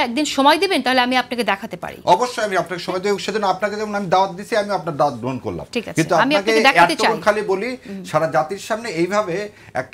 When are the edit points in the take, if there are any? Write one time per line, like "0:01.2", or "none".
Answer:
none